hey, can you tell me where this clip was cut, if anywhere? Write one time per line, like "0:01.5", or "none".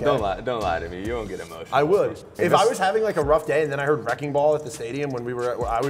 0:02.3